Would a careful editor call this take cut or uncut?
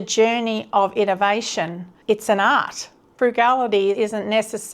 cut